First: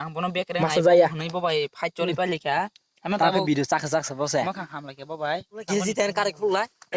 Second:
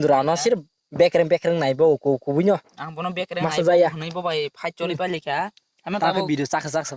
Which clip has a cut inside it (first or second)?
first